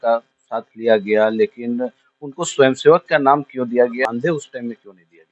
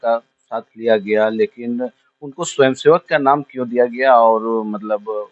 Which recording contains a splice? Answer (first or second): first